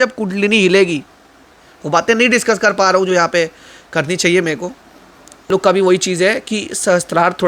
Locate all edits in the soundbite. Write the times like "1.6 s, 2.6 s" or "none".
5.5 s